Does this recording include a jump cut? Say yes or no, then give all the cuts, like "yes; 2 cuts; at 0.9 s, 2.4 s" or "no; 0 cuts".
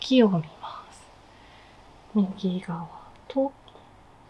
no; 0 cuts